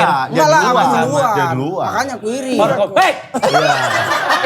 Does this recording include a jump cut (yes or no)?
yes